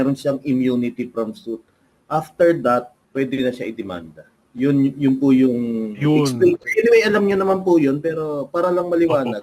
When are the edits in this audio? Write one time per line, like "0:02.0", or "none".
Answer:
0:03.0